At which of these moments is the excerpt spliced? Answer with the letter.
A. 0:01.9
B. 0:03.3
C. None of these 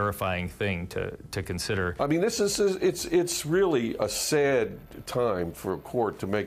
A